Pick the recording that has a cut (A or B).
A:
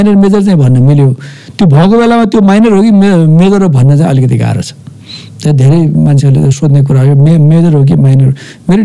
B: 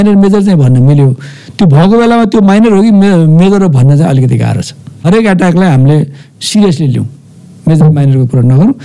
B